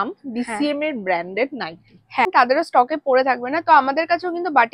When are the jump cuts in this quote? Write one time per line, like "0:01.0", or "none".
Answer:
0:02.3